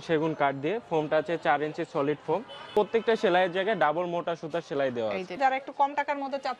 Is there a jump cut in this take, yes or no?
yes